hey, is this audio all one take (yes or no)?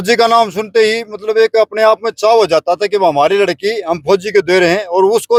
yes